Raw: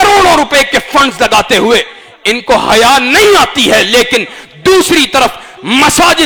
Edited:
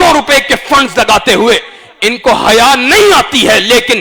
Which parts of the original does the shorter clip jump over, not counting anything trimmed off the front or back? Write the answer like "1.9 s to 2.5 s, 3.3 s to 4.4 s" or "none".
none